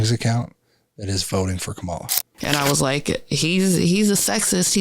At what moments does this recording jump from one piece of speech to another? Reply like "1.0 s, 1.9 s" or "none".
2.4 s